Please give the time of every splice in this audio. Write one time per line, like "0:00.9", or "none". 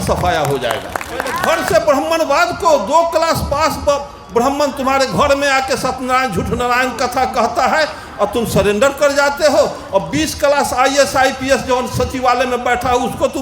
0:01.4